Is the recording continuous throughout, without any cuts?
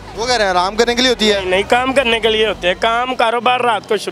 yes; 0 cuts

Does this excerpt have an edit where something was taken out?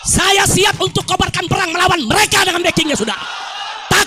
no; 0 cuts

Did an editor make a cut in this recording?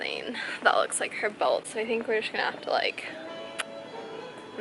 no; 0 cuts

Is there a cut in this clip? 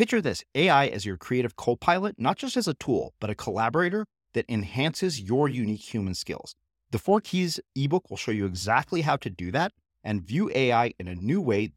no; 0 cuts

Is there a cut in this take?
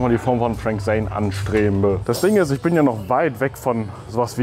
yes; 1 cut; at 2.0 s

